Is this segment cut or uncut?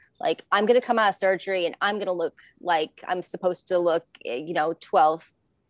uncut